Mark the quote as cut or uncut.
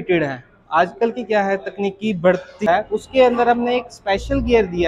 cut